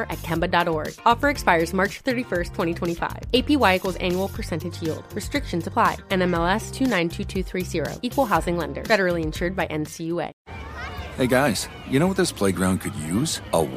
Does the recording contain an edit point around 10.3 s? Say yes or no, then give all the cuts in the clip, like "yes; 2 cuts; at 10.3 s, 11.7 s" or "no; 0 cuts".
yes; 1 cut; at 10.3 s